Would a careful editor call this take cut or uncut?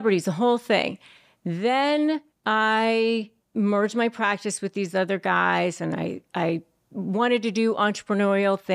cut